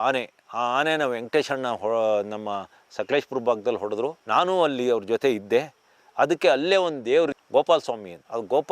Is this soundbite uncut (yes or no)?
no